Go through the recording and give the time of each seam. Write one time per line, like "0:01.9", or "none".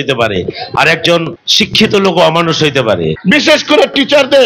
0:01.4
0:03.2